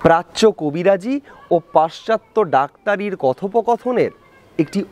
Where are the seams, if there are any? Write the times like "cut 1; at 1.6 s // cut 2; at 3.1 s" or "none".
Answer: none